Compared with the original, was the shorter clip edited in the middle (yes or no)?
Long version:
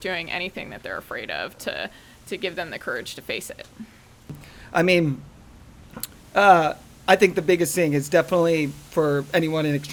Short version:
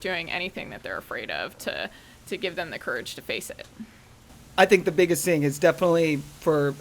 yes